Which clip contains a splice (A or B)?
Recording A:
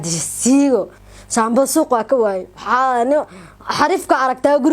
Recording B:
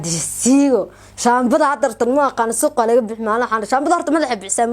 A